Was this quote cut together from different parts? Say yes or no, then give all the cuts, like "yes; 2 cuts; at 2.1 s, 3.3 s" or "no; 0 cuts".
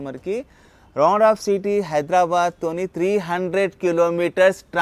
no; 0 cuts